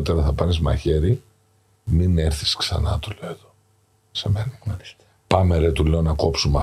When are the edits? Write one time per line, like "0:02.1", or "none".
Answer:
none